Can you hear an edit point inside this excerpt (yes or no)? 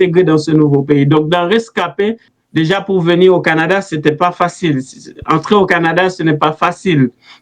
yes